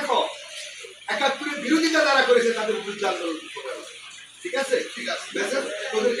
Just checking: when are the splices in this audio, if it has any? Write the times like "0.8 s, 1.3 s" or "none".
none

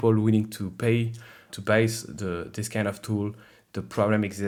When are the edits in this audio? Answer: none

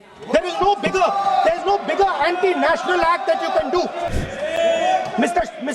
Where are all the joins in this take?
4.1 s

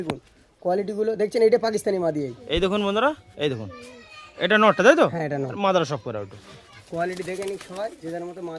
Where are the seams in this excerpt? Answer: 2.3 s, 7.0 s

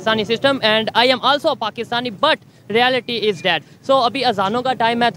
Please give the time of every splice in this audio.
none

